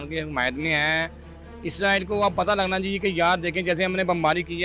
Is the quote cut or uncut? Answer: uncut